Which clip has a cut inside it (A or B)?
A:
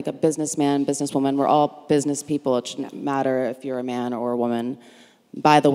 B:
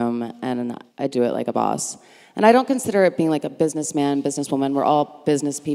B